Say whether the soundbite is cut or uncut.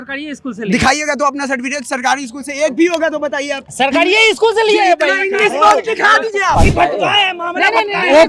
cut